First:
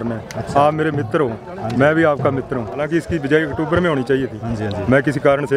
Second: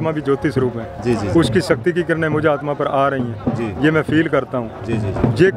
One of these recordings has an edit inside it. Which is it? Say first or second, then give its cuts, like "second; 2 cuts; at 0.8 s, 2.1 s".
first; 1 cut; at 2.8 s